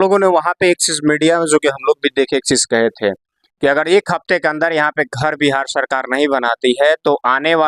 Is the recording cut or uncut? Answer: uncut